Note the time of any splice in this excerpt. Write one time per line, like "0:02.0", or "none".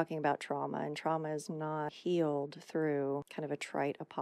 0:02.0
0:03.3